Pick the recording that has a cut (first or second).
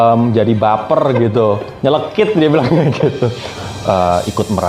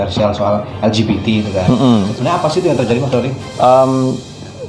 first